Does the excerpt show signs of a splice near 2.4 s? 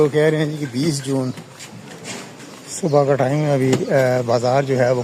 yes; 1 cut; at 2.4 s

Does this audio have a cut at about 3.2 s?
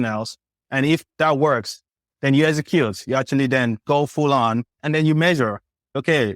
no; 3 cuts; at 1.1 s, 2.0 s, 4.8 s

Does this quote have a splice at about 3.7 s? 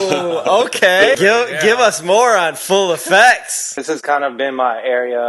yes; 2 cuts; at 1.2 s, 3.7 s

